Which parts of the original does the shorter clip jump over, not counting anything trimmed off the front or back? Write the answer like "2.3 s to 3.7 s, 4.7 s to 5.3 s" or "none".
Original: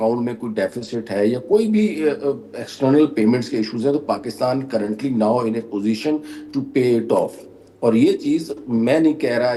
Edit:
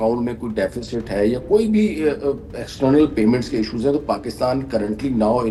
none